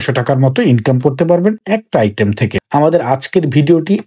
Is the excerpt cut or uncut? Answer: cut